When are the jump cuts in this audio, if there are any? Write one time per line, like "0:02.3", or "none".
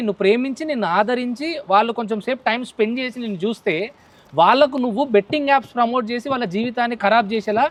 none